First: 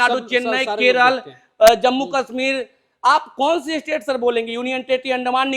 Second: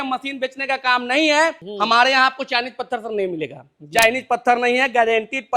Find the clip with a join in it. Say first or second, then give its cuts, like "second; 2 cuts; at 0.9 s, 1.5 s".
second; 1 cut; at 1.6 s